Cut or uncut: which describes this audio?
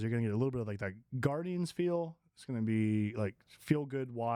uncut